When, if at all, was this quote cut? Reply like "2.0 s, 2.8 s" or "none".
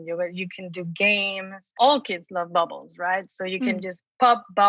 1.8 s